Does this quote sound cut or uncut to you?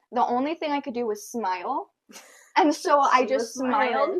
uncut